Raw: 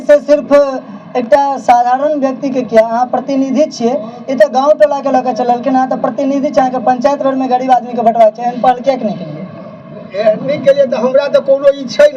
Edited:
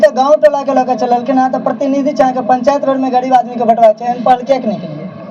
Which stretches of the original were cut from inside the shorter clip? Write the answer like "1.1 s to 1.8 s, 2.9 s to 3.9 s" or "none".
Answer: none